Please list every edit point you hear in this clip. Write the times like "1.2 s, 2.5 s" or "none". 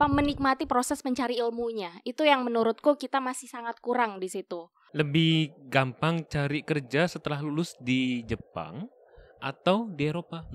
4.8 s